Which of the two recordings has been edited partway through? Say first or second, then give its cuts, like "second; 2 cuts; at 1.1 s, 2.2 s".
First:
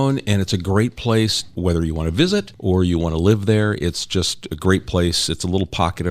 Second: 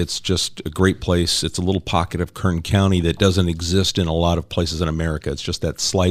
first; 2 cuts; at 1.5 s, 2.5 s